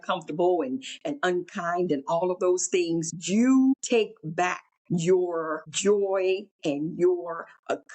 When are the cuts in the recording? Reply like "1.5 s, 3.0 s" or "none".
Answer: 3.1 s, 4.3 s, 5.6 s, 6.5 s